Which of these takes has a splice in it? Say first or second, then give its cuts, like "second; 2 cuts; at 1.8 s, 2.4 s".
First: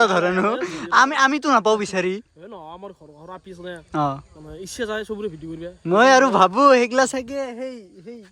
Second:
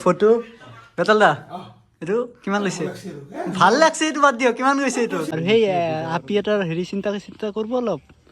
second; 1 cut; at 5.3 s